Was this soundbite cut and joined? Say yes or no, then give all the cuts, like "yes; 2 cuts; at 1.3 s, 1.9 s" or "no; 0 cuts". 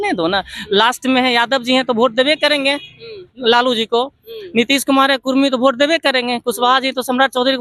no; 0 cuts